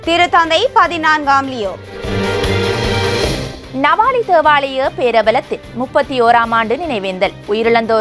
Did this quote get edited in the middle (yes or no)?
no